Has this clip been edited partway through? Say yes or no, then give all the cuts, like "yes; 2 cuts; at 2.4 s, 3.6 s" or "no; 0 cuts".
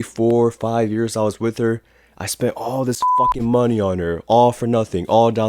no; 0 cuts